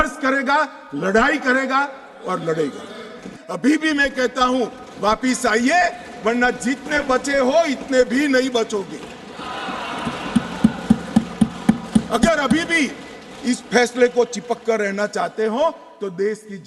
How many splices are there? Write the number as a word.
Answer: one